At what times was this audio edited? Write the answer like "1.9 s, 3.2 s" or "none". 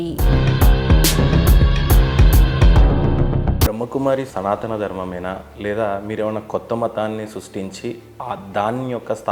3.7 s